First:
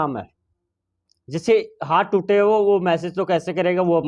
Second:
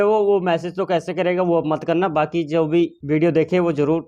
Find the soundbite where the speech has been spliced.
second; 1 cut; at 3.0 s

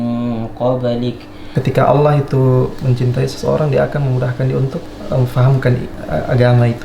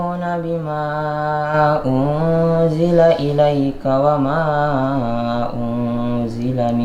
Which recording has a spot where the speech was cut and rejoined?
first; 3 cuts; at 1.3 s, 4.9 s, 5.9 s

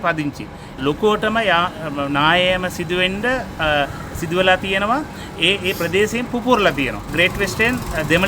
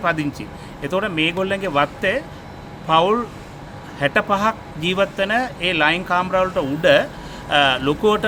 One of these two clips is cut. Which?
first; 2 cuts; at 0.8 s, 7.1 s

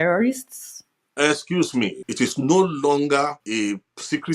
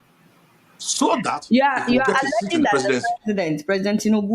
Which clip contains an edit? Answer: first; 2 cuts; at 2.0 s, 3.4 s

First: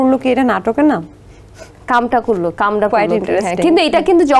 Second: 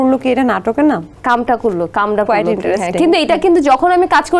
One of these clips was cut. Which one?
second; 1 cut; at 1.1 s

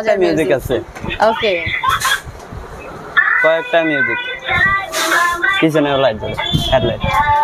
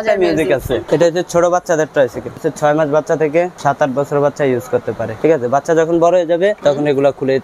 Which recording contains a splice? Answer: second; 5 cuts; at 0.8 s, 2.4 s, 3.5 s, 5.1 s, 6.6 s

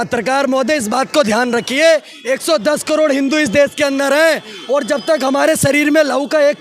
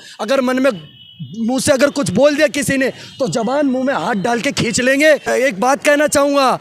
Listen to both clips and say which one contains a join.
second; 1 cut; at 5.3 s

